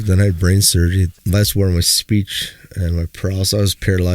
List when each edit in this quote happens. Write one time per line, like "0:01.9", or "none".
0:01.1